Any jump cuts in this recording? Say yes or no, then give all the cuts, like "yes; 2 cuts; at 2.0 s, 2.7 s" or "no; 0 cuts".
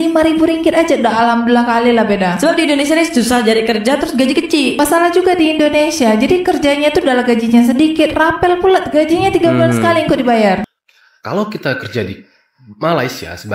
yes; 1 cut; at 10.7 s